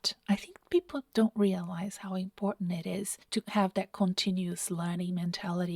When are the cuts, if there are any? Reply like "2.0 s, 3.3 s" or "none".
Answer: none